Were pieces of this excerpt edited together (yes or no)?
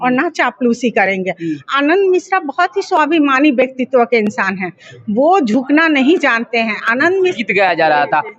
yes